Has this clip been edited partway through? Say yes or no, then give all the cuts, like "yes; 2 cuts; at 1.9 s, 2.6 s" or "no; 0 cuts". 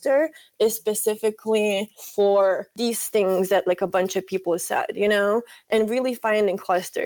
yes; 3 cuts; at 2.0 s, 2.7 s, 5.7 s